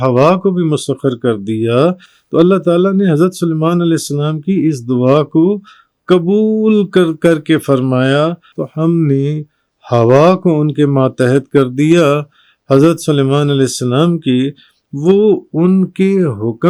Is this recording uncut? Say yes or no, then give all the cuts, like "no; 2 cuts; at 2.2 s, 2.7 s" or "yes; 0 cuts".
yes; 0 cuts